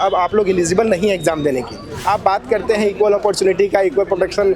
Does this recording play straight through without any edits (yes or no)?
no